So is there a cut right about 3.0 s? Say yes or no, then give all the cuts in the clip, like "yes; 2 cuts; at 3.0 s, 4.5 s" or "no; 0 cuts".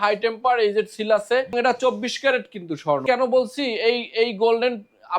yes; 2 cuts; at 1.5 s, 3.0 s